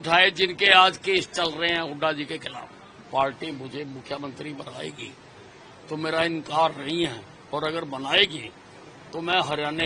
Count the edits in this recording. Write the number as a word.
one